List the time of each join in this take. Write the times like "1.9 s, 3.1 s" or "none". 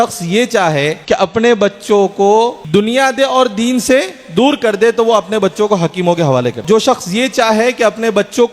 1.0 s, 2.6 s, 6.6 s